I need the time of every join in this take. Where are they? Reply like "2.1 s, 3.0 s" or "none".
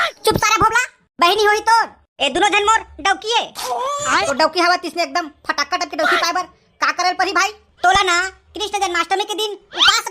4.3 s, 7.6 s